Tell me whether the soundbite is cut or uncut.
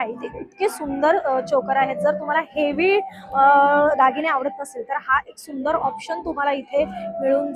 uncut